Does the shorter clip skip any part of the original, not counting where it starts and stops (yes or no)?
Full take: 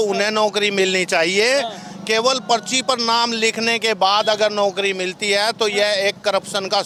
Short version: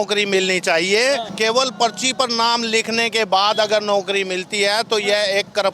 yes